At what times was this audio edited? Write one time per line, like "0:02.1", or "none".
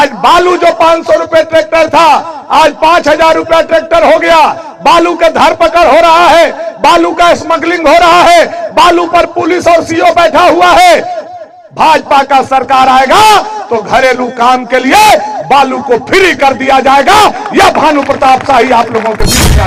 none